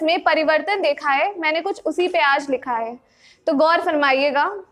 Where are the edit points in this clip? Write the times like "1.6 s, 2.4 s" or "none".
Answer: none